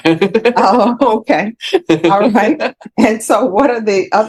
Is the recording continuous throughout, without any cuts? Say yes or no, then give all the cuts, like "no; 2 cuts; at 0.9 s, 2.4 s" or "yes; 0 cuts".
yes; 0 cuts